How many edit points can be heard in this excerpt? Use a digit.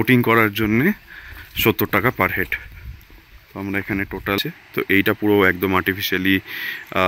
1